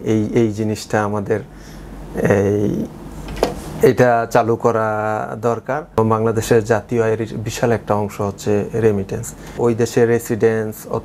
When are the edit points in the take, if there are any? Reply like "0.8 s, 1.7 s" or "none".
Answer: 6.0 s, 9.5 s